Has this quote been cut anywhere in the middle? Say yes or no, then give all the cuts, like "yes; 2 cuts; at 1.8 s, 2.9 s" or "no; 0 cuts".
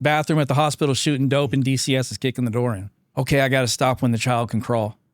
yes; 1 cut; at 3.1 s